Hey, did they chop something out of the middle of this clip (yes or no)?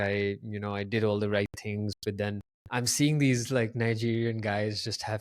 yes